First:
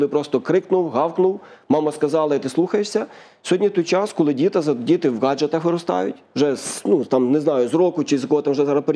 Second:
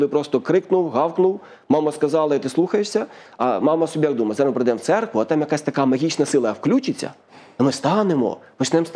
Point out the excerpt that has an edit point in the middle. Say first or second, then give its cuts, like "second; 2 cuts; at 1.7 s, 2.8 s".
second; 1 cut; at 3.3 s